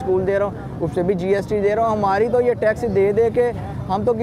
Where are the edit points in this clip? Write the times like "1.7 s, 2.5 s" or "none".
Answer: none